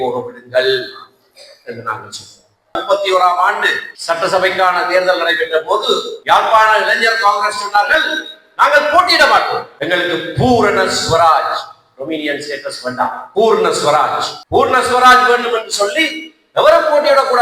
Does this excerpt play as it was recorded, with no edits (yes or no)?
no